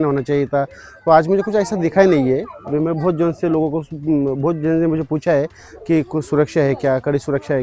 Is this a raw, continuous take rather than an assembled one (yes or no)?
yes